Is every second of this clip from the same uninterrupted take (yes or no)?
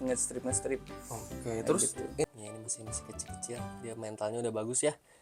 no